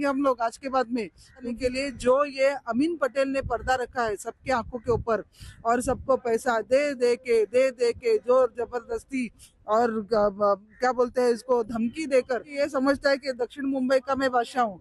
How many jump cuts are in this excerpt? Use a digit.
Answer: 2